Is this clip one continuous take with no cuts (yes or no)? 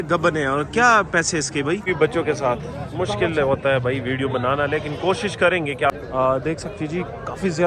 no